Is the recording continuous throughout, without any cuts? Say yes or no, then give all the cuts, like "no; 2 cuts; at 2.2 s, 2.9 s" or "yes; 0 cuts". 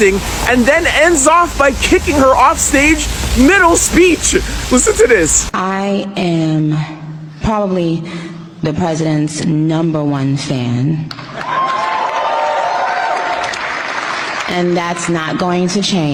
yes; 0 cuts